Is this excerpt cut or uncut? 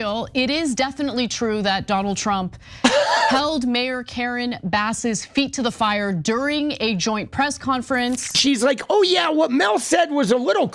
cut